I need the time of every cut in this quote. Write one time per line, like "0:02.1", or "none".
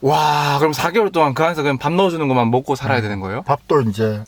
none